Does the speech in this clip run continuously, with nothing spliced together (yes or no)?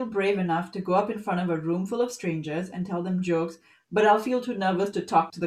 yes